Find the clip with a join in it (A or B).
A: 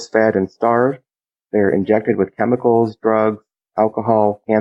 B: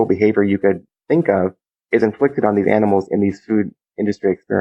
B